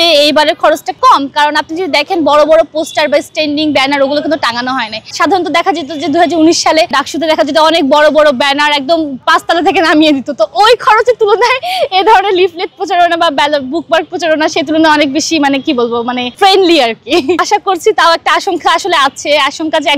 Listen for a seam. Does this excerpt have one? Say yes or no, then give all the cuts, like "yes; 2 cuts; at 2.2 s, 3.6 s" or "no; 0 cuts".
no; 0 cuts